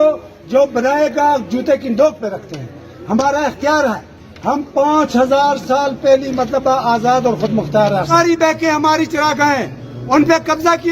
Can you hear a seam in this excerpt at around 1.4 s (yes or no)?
no